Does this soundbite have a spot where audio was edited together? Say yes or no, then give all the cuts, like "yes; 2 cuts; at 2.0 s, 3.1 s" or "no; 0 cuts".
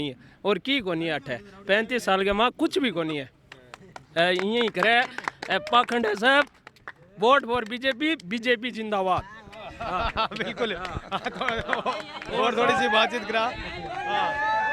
no; 0 cuts